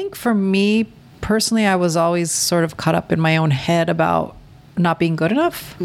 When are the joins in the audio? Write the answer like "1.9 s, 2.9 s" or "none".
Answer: 1.1 s